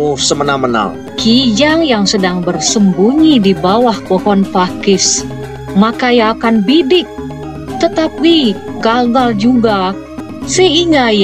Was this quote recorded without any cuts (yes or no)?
no